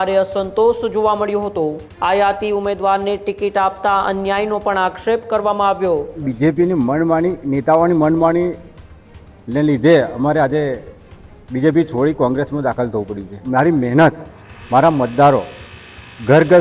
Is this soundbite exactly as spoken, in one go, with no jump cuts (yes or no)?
no